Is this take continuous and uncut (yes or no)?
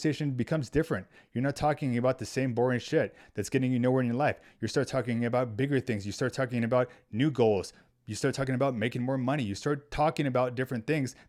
yes